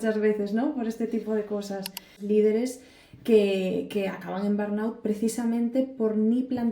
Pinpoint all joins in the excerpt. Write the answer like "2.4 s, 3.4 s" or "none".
2.2 s